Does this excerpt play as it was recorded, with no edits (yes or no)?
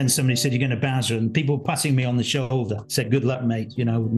yes